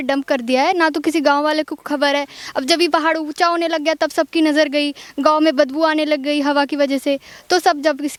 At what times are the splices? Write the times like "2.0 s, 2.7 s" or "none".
none